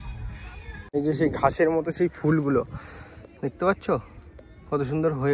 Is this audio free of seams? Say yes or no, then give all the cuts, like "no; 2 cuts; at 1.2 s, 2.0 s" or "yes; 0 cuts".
no; 1 cut; at 0.9 s